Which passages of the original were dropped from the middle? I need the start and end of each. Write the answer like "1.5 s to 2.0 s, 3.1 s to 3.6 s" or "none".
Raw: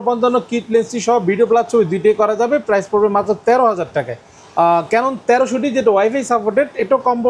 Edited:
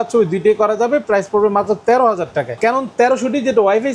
4.2 s to 4.9 s